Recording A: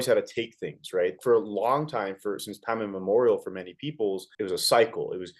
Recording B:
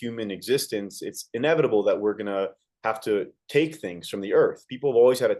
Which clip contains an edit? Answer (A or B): A